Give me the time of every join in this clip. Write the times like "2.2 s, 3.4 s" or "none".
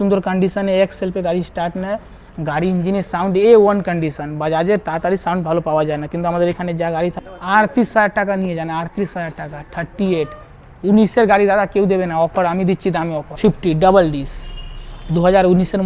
7.2 s, 13.2 s